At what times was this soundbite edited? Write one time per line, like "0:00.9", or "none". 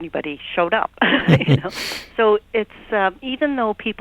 none